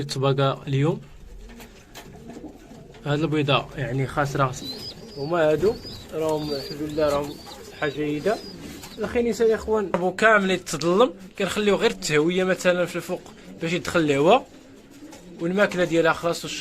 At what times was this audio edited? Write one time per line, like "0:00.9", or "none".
0:04.7
0:10.0